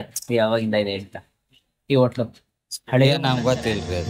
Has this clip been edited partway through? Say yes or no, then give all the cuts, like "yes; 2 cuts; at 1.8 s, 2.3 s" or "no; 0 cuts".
no; 0 cuts